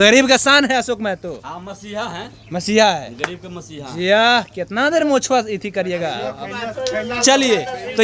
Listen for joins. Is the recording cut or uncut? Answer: uncut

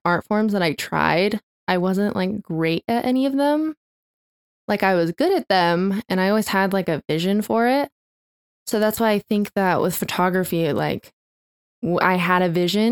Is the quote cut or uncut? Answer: uncut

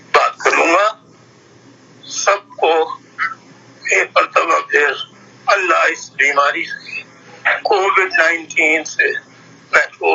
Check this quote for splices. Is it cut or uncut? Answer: uncut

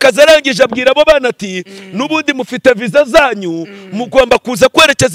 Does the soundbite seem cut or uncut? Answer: uncut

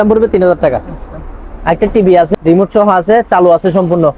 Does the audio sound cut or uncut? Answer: cut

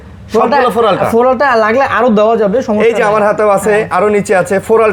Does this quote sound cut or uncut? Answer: uncut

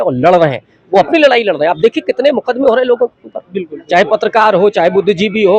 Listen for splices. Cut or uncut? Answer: uncut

